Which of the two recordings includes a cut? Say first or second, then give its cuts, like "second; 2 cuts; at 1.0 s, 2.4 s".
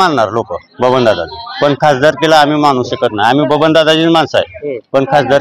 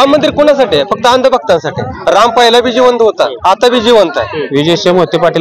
second; 3 cuts; at 1.9 s, 3.4 s, 4.4 s